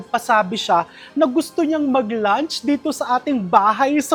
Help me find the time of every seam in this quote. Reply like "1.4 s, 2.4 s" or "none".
none